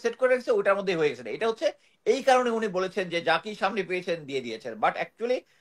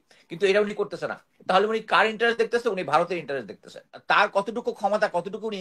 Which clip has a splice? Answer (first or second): second